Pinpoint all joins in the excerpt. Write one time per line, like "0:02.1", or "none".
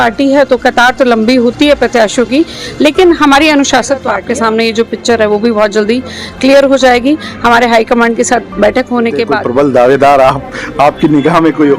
0:04.2
0:09.4

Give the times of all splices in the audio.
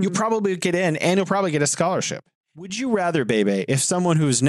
0:02.4

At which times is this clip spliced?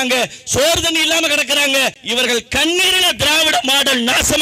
0:02.0

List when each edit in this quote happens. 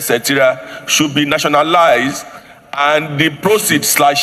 none

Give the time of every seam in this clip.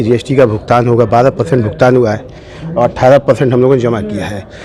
none

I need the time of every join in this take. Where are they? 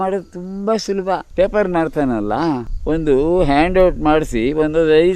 0:01.3
0:02.7

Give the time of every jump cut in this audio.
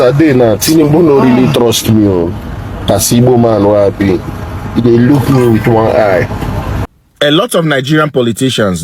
0:06.8

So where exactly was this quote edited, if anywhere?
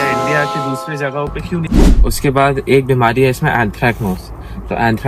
0:01.6

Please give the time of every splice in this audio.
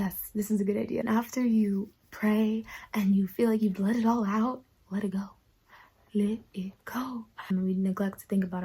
0:01.0
0:07.5

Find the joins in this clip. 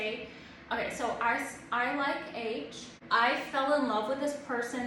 0:02.9

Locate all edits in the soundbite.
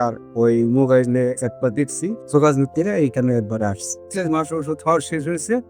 0:02.2
0:04.0

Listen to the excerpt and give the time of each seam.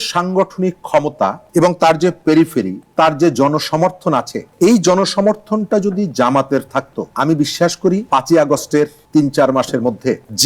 none

